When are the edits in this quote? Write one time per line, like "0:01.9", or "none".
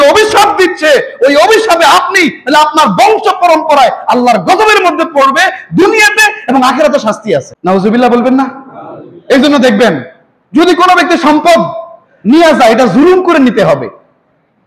0:07.5